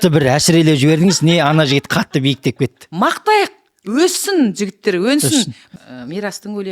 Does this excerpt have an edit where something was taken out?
yes; 2 cuts; at 2.8 s, 5.6 s

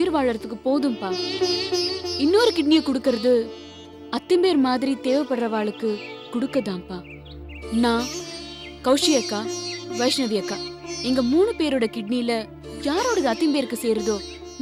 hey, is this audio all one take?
yes; 0 cuts

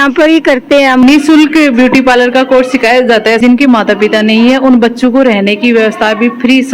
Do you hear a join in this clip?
yes; 2 cuts; at 1.0 s, 3.4 s

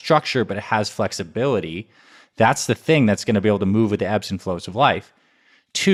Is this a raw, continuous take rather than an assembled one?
yes; 0 cuts

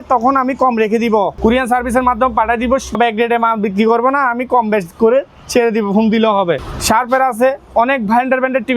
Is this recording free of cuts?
no; 3 cuts; at 1.3 s, 3.0 s, 6.7 s

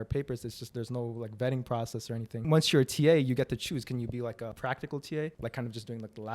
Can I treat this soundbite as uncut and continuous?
no; 3 cuts; at 2.5 s, 4.5 s, 5.4 s

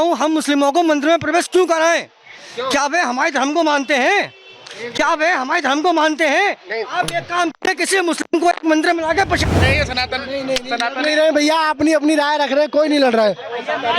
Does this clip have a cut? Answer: yes; 1 cut; at 9.5 s

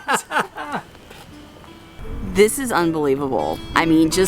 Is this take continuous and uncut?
no; 1 cut; at 1.9 s

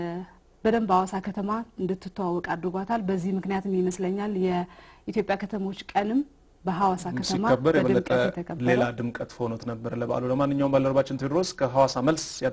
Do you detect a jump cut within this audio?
yes; 1 cut; at 10.0 s

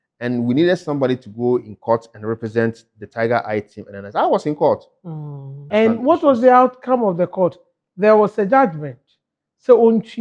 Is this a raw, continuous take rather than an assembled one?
no; 1 cut; at 5.6 s

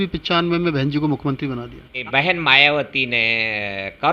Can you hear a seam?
yes; 1 cut; at 2.0 s

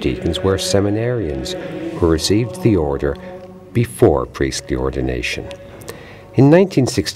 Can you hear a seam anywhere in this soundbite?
no; 0 cuts

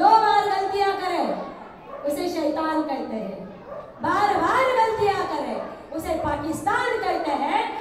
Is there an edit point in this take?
no; 0 cuts

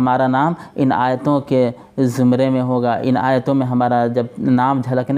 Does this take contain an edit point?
no; 0 cuts

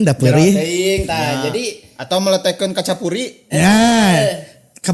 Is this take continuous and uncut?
yes; 0 cuts

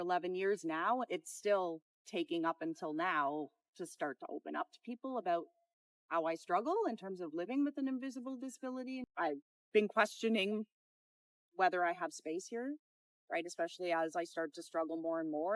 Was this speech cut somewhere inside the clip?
yes; 2 cuts; at 1.0 s, 9.0 s

